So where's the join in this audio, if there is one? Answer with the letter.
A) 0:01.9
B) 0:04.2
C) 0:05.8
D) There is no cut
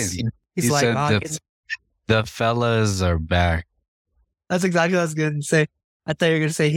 D